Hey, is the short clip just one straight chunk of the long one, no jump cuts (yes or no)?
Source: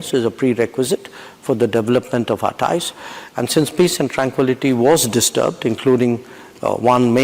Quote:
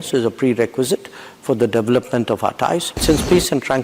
no